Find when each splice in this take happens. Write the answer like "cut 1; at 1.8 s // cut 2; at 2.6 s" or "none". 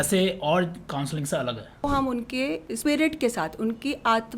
cut 1; at 1.8 s // cut 2; at 2.7 s